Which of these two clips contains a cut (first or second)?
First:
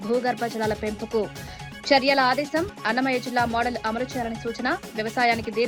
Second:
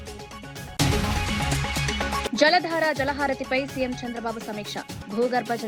second